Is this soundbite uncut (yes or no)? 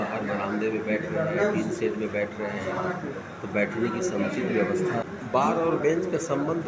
no